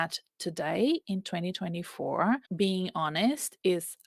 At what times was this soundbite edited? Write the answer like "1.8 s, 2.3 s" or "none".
2.5 s